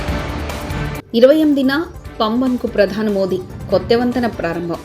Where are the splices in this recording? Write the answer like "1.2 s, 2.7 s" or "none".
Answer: 1.0 s